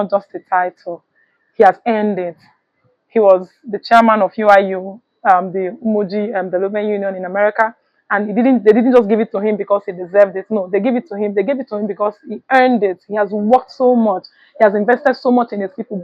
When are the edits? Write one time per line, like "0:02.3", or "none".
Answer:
none